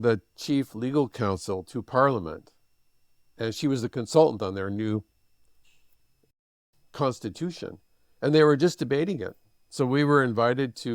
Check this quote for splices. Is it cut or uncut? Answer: uncut